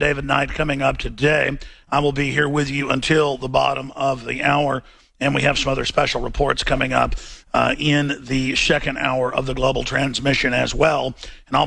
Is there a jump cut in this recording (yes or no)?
no